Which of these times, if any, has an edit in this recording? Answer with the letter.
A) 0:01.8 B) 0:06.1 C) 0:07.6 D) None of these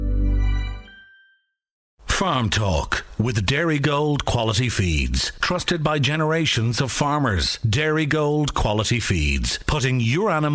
A